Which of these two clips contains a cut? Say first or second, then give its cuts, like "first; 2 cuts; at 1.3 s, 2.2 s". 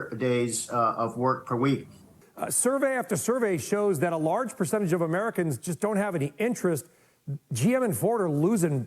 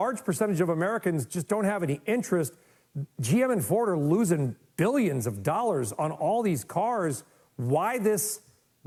first; 1 cut; at 2.2 s